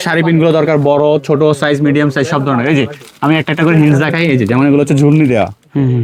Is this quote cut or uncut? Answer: uncut